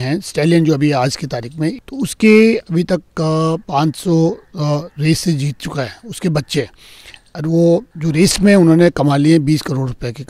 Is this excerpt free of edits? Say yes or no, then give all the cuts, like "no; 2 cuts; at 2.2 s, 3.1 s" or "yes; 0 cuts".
no; 3 cuts; at 1.8 s, 3.6 s, 7.9 s